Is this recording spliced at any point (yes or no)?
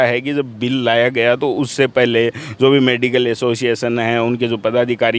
no